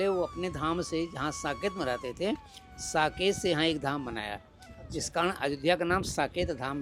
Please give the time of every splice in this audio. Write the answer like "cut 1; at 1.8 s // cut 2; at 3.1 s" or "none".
none